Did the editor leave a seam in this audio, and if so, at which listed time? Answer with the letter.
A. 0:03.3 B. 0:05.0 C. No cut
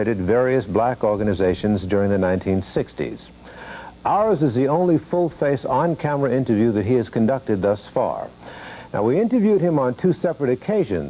A